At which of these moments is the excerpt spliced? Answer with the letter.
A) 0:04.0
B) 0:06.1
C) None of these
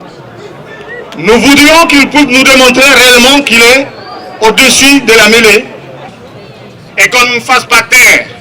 B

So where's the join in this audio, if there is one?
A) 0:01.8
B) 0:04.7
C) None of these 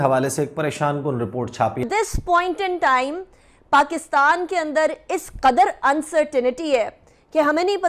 A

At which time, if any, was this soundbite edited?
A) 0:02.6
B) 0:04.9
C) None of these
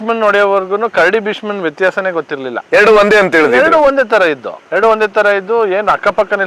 C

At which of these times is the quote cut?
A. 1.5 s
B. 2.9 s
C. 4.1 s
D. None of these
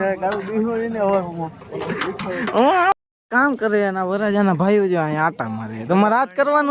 B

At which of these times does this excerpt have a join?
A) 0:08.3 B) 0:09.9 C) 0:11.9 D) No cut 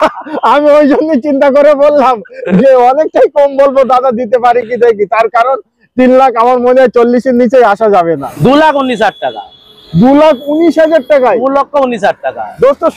A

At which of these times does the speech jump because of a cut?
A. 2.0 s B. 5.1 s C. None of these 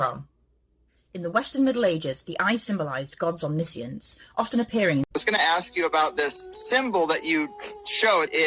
B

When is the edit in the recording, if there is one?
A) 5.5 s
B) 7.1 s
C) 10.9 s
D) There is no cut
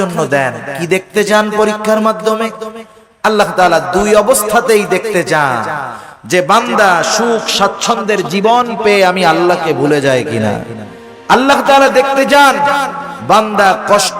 D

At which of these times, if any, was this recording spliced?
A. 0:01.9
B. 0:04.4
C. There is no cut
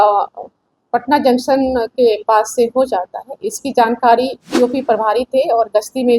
B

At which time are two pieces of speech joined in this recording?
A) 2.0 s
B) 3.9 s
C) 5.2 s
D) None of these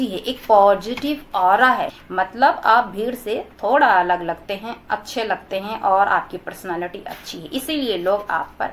A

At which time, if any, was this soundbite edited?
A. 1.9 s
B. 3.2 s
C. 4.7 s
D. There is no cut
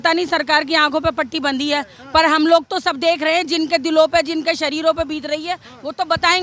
D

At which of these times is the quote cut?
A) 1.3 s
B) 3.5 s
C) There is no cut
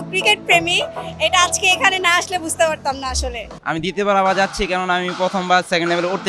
C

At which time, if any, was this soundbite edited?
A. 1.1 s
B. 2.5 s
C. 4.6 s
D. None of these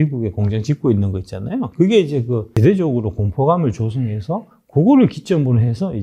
B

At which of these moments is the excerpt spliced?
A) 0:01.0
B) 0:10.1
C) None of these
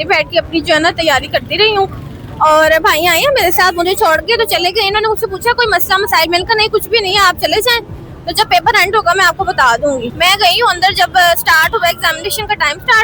B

